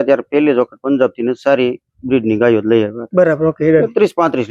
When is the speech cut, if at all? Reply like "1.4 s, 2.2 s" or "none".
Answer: none